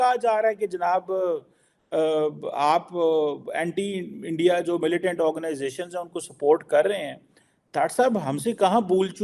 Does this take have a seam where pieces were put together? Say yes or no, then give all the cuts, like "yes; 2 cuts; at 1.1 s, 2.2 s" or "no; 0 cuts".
no; 0 cuts